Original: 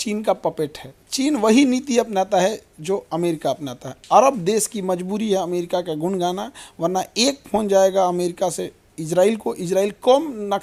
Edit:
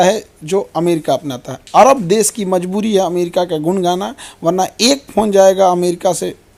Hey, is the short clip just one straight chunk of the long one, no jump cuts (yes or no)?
yes